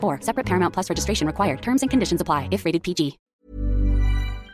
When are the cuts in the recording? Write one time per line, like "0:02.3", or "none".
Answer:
0:03.2